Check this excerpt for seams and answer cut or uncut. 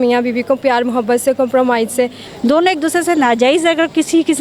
cut